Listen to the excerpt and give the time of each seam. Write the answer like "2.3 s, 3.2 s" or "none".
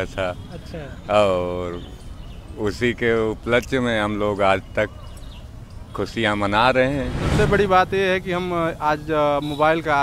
7.2 s